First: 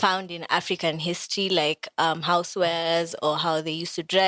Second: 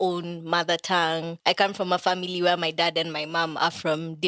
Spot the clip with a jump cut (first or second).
second